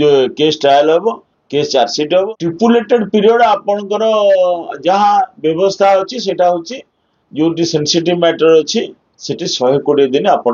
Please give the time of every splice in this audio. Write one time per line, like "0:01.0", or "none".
0:02.3